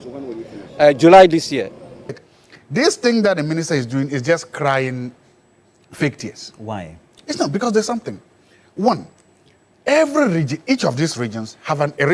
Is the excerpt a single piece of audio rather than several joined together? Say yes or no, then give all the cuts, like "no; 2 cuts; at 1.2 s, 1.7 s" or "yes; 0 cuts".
no; 1 cut; at 2.2 s